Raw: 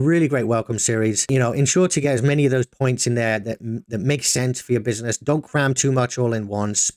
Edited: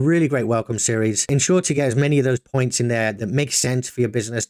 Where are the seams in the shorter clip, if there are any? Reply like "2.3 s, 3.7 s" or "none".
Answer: 1.2 s, 3.2 s